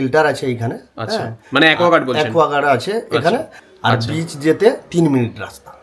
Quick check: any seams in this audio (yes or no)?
yes